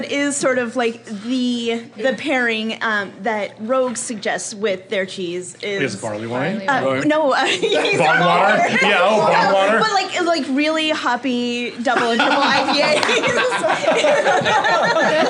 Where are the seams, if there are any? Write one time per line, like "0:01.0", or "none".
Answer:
none